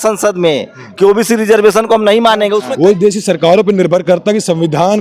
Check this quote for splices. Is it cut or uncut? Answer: cut